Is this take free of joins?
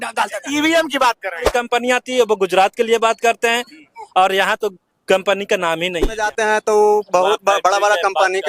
no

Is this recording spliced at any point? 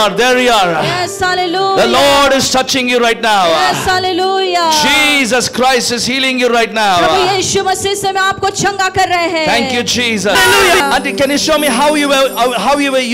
yes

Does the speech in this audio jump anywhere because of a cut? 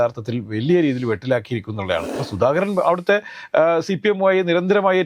yes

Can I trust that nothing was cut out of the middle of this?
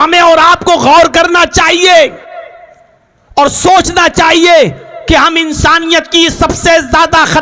yes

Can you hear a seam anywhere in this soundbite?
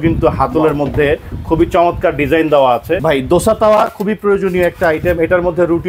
yes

